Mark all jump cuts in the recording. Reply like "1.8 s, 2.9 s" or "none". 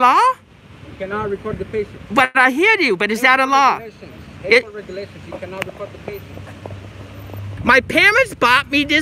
7.5 s